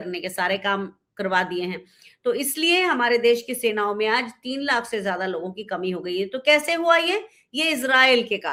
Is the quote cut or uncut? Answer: uncut